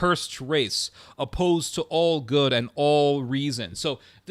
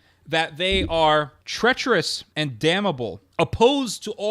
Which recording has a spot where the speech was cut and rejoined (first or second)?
second